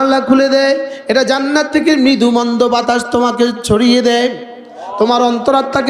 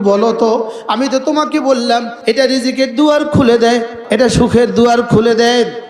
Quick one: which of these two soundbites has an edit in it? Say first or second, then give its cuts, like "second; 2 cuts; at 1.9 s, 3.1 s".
second; 2 cuts; at 2.1 s, 4.0 s